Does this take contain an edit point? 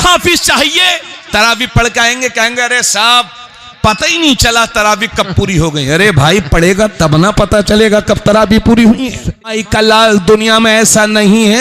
yes; 1 cut; at 9.6 s

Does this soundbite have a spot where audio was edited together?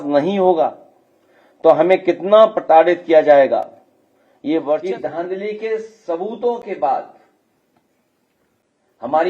yes; 1 cut; at 4.8 s

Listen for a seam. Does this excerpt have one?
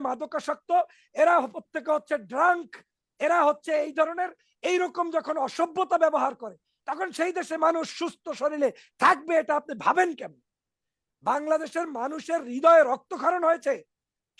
no; 0 cuts

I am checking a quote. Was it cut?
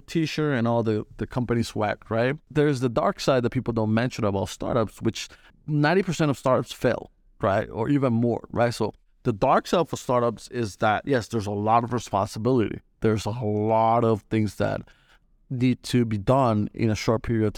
yes; 2 cuts; at 2.4 s, 5.5 s

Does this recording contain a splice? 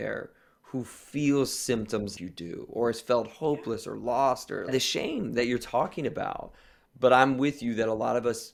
no; 0 cuts

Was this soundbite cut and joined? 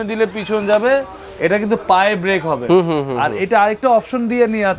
no; 0 cuts

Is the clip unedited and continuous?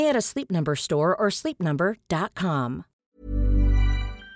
no; 1 cut; at 2.9 s

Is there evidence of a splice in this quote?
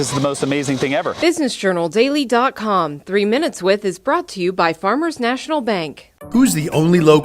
yes; 1 cut; at 1.2 s

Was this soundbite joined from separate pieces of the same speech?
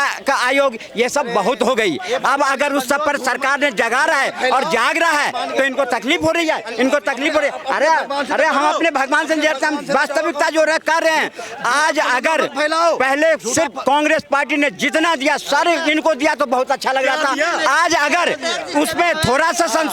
no; 0 cuts

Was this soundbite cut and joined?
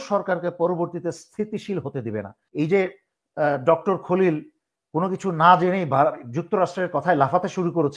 yes; 1 cut; at 2.4 s

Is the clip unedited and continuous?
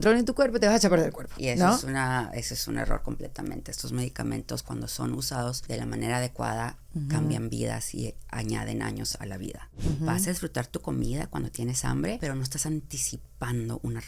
no; 4 cuts; at 1.3 s, 5.6 s, 9.7 s, 12.2 s

